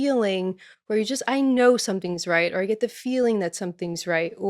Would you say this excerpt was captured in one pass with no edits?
yes; 0 cuts

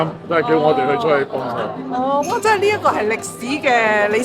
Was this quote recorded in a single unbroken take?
yes; 0 cuts

